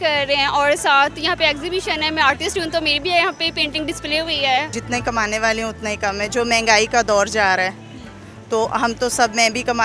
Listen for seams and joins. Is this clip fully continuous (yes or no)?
no